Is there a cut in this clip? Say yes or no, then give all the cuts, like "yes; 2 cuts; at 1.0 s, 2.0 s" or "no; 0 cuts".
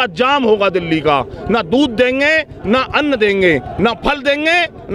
no; 0 cuts